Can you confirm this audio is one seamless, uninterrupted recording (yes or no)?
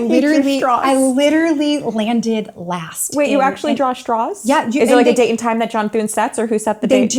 yes